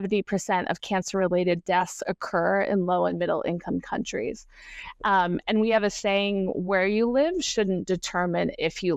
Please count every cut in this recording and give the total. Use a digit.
0